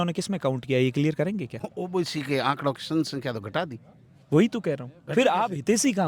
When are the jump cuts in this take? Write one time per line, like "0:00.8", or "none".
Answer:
0:01.6